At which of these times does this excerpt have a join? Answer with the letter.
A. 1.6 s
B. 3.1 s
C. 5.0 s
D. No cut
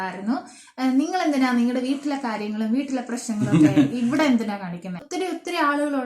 C